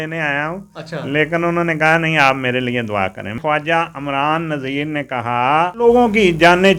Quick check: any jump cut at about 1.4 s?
no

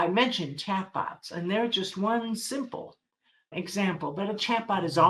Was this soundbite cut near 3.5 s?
yes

